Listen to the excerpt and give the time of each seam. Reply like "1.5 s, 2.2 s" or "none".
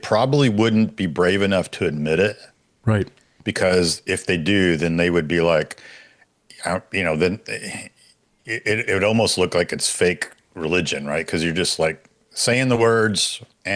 none